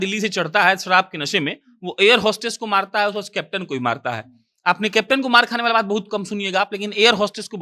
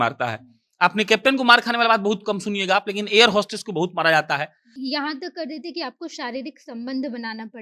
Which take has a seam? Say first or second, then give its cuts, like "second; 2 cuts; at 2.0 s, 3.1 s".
second; 1 cut; at 4.7 s